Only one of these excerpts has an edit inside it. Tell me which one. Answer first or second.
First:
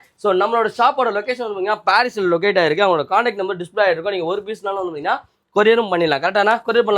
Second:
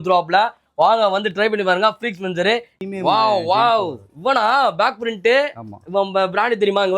second